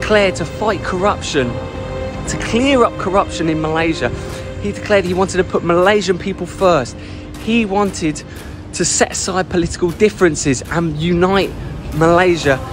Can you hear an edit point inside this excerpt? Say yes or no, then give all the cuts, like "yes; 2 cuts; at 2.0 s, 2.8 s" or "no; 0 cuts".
no; 0 cuts